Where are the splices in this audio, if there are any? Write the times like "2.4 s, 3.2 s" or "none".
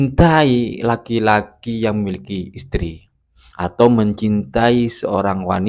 none